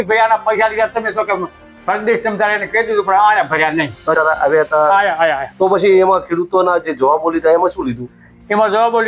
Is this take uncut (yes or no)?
no